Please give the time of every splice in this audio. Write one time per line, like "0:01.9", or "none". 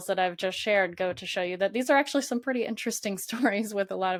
none